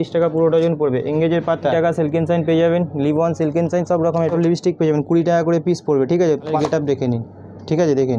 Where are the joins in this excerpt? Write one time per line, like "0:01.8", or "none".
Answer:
0:01.7
0:04.3
0:06.5

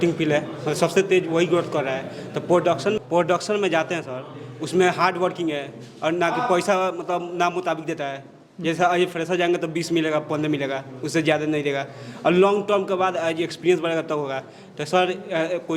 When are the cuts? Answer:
0:03.0

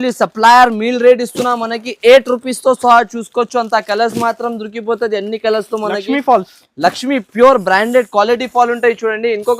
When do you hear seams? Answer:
none

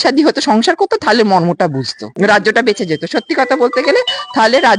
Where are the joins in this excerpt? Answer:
0:02.0

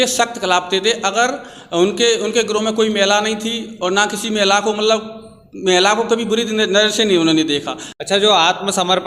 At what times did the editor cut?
0:07.8

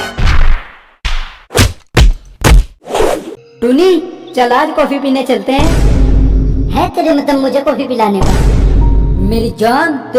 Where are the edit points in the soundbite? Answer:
0:03.4

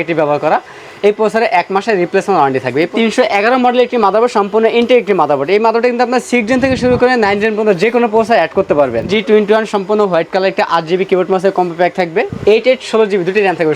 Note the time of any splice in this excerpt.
0:02.9
0:09.1
0:12.3

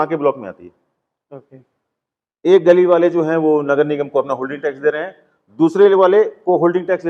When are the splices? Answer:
none

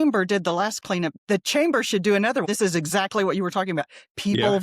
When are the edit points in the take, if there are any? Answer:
0:01.1
0:02.4

